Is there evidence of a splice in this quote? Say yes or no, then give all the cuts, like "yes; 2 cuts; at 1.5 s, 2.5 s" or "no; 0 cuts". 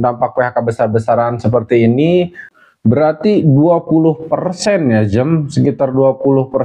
yes; 1 cut; at 2.4 s